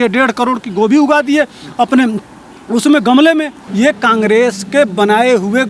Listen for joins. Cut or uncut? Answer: cut